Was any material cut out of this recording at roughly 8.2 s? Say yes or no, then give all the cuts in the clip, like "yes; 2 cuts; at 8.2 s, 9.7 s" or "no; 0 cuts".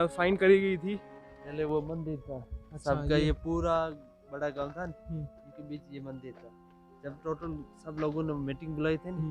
no; 1 cut; at 1.0 s